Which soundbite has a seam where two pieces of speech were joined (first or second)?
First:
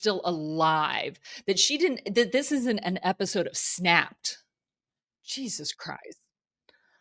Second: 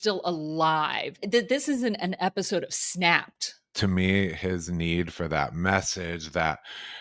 second